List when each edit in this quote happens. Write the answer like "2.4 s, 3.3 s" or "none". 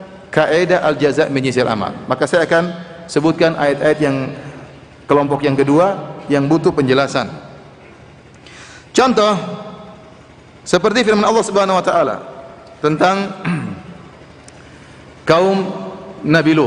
none

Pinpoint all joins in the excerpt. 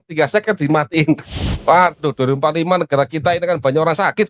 1.3 s

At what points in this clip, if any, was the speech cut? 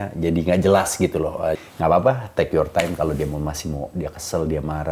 1.6 s

